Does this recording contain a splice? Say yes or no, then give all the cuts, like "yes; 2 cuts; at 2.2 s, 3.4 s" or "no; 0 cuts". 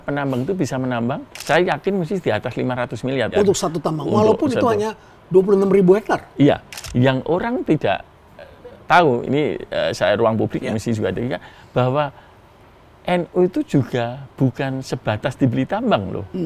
yes; 3 cuts; at 1.4 s, 3.3 s, 6.8 s